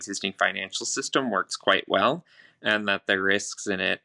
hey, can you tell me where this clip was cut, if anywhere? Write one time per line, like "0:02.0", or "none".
none

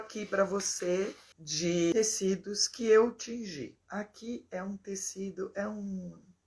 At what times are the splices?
0:01.5
0:03.8

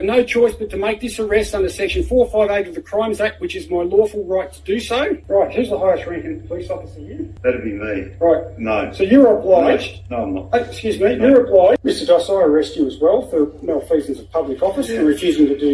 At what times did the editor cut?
0:05.2
0:07.3
0:11.8

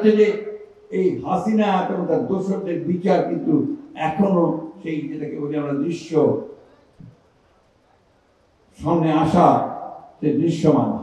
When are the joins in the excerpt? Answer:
none

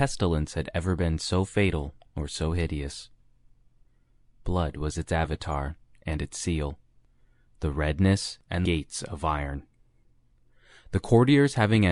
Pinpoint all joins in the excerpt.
none

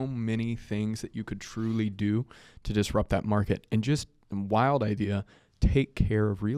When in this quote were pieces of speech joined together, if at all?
none

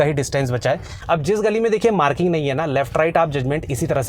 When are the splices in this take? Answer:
0:00.9

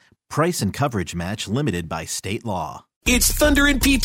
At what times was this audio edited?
0:02.9

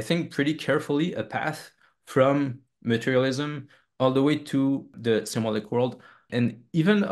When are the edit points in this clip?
0:04.9
0:06.3

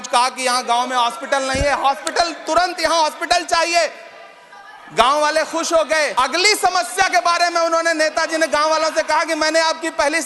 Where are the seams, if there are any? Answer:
0:06.1

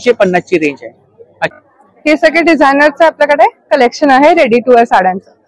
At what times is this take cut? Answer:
0:01.5

